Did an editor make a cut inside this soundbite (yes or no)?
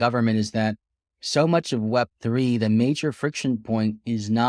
no